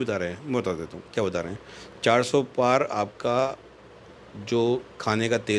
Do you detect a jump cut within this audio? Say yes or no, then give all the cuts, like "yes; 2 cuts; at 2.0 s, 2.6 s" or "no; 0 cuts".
no; 0 cuts